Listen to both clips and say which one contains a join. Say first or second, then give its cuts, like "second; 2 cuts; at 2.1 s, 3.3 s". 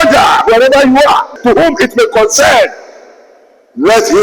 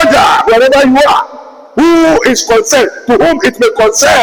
first; 1 cut; at 1.3 s